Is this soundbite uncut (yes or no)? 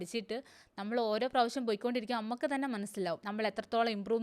no